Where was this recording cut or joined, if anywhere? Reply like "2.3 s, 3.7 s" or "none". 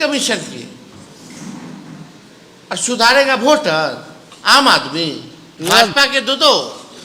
5.5 s